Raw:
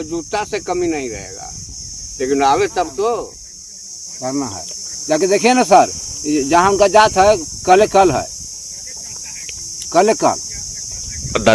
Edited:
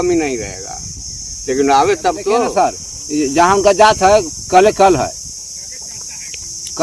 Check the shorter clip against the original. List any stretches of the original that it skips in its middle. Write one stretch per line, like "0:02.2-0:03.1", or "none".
0:03.2-0:05.7